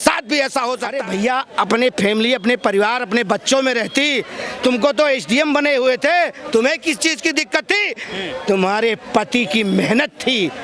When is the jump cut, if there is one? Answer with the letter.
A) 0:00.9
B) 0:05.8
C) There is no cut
A